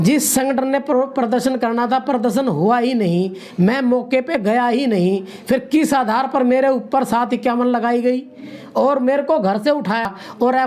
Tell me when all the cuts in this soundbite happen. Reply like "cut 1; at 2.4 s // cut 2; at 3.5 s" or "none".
none